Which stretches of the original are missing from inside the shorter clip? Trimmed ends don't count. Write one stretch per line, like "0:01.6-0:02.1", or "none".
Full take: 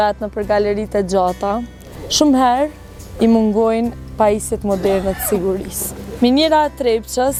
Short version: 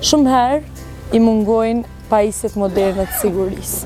none